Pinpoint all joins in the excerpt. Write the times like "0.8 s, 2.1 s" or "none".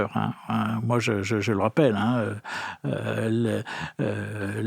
none